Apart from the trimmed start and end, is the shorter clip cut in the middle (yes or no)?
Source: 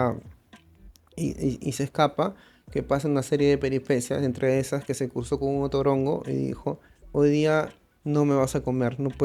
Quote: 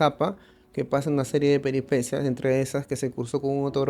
no